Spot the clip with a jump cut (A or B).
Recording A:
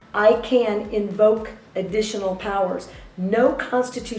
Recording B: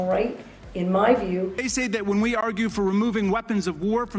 B